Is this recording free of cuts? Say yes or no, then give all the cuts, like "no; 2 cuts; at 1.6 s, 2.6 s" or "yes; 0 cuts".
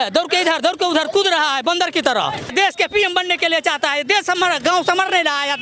no; 1 cut; at 2.5 s